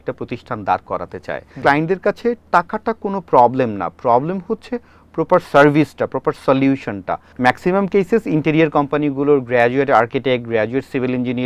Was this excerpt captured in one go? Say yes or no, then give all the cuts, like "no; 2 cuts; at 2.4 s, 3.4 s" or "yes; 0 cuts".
no; 2 cuts; at 1.6 s, 7.3 s